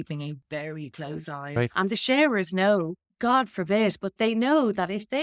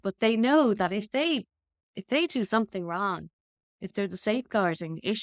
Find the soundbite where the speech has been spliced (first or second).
first